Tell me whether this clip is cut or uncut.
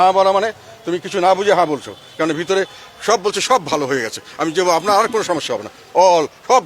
uncut